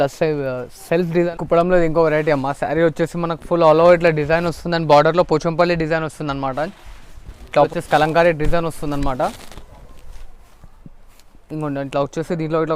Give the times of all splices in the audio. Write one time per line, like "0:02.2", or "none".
0:01.3
0:07.7